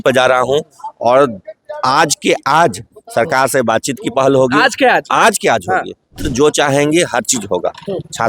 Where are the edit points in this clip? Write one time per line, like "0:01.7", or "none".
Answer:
0:06.2